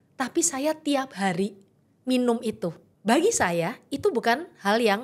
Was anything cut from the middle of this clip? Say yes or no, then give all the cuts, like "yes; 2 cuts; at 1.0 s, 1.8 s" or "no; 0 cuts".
yes; 1 cut; at 2.9 s